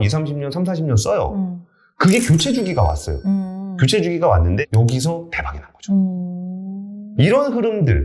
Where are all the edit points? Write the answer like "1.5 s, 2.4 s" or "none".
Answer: 4.6 s